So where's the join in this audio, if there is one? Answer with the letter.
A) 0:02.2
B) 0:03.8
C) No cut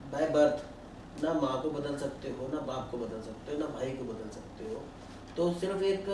C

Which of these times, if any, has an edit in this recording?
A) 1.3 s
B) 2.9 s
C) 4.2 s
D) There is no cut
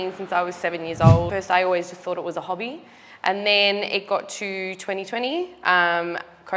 A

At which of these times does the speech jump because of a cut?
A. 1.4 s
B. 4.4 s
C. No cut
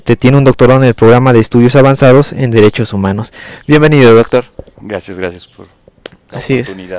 C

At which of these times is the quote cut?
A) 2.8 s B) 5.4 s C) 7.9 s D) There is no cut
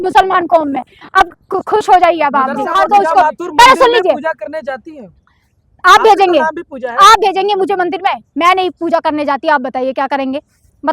A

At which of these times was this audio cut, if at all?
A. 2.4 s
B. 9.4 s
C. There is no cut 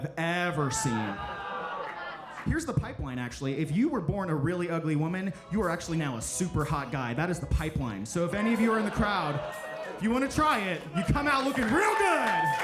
A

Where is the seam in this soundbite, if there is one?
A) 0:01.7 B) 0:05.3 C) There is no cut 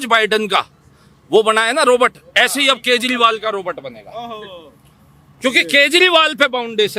C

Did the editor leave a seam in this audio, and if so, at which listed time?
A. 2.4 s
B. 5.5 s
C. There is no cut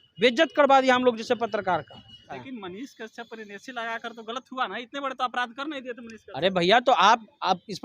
A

